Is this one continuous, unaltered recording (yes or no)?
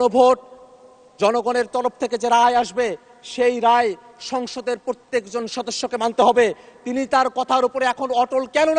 yes